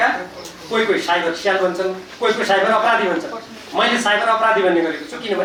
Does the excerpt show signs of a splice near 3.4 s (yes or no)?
no